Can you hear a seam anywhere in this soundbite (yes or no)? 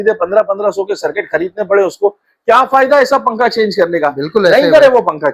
no